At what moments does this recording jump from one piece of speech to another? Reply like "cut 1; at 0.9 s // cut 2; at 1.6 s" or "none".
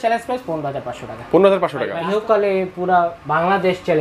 cut 1; at 1.9 s